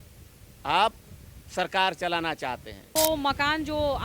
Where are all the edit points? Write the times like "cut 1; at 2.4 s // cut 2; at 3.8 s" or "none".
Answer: cut 1; at 2.9 s